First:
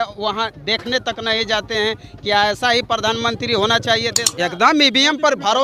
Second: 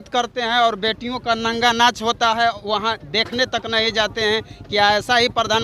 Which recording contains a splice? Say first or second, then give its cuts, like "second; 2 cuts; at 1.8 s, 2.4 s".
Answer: first; 1 cut; at 4.2 s